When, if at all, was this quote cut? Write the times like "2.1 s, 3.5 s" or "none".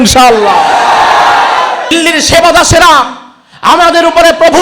1.9 s